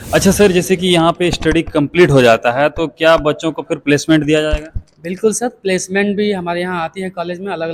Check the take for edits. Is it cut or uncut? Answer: uncut